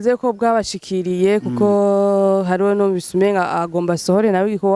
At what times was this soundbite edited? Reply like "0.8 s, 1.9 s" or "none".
none